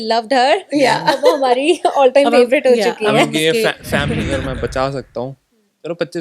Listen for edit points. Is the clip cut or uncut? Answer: cut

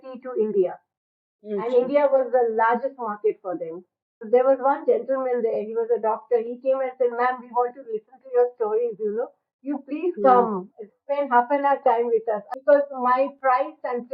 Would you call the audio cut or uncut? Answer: cut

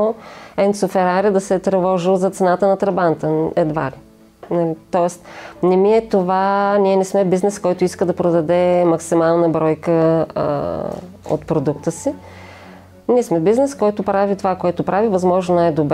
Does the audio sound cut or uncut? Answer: uncut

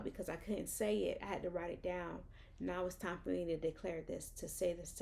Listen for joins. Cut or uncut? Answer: uncut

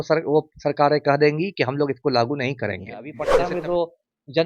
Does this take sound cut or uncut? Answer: cut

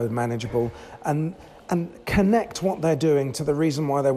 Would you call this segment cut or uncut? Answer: uncut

